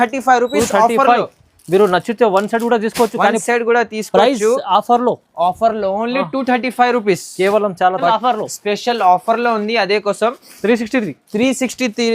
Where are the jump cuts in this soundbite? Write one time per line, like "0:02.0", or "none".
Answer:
0:08.0